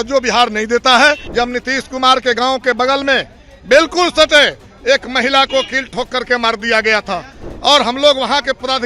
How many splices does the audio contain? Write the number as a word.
one